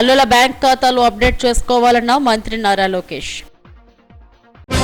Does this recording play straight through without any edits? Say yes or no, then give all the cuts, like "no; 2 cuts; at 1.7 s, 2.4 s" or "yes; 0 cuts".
yes; 0 cuts